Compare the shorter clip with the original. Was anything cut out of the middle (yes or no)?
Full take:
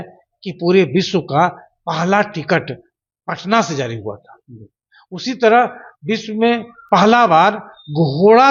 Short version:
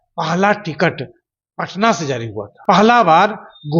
yes